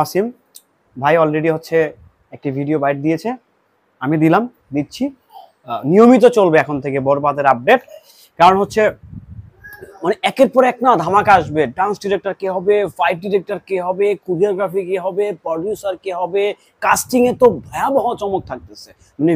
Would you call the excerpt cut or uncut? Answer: uncut